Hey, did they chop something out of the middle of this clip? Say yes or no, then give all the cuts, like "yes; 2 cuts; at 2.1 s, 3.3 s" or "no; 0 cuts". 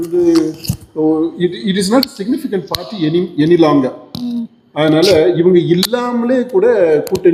no; 0 cuts